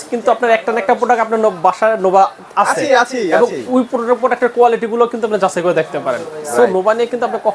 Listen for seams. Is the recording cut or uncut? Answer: uncut